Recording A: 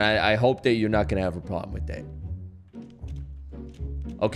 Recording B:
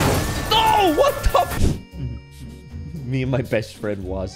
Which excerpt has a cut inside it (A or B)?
B